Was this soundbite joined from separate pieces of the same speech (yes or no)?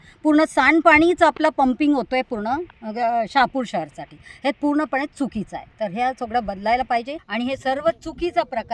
yes